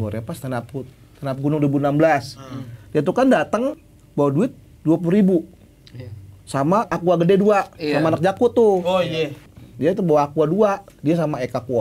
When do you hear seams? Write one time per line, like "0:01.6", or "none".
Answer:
0:03.8
0:06.9
0:09.4